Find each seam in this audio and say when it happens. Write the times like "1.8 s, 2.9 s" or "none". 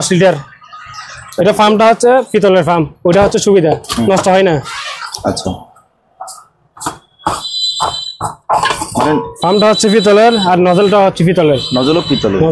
none